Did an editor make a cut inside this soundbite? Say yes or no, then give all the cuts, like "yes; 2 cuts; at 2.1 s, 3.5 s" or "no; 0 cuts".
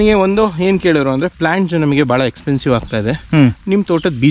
no; 0 cuts